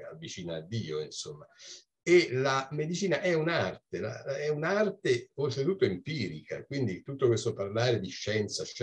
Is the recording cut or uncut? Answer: uncut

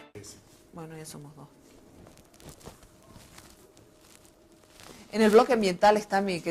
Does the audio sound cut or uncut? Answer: uncut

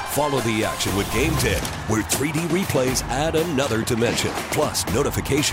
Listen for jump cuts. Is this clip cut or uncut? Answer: uncut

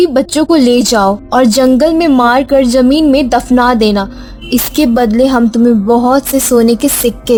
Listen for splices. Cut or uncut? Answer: uncut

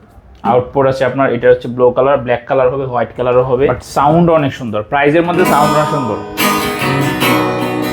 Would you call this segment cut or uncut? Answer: cut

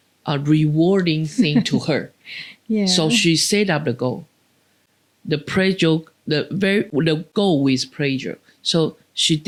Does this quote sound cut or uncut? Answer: uncut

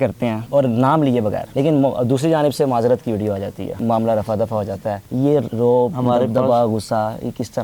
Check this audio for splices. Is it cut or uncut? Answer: cut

